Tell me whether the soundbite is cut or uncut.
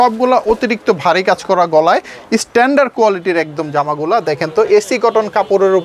uncut